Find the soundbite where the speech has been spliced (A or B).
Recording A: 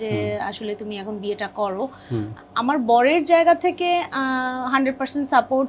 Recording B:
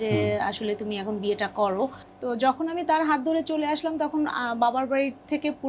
B